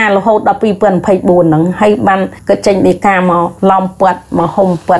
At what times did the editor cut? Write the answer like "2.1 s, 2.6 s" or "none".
2.3 s, 3.5 s